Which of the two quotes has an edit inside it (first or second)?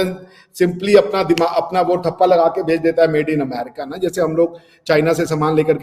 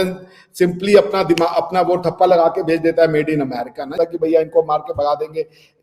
second